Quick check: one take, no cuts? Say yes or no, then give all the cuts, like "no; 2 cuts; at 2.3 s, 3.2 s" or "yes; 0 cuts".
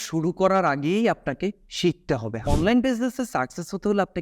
no; 1 cut; at 2.3 s